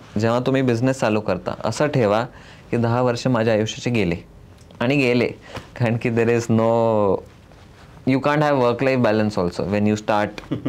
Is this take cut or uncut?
uncut